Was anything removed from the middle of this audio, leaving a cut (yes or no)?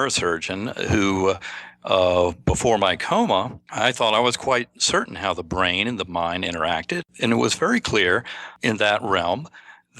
yes